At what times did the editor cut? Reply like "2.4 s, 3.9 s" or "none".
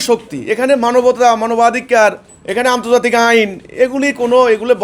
none